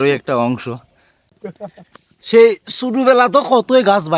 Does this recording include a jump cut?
yes; 1 cut; at 1.2 s

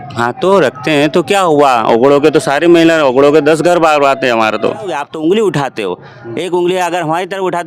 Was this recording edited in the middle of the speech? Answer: yes; 1 cut; at 4.9 s

